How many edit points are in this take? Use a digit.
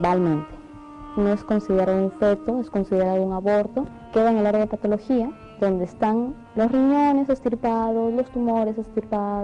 2